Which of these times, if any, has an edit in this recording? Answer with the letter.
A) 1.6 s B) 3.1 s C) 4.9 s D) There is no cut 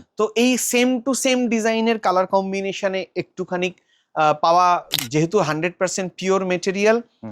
C